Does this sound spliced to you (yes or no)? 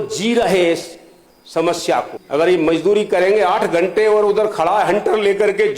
yes